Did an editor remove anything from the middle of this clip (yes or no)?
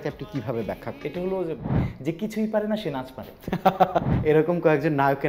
yes